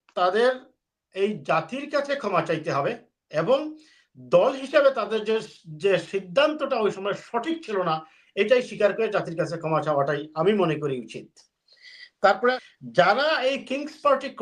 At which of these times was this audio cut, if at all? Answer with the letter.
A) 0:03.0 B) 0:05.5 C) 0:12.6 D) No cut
C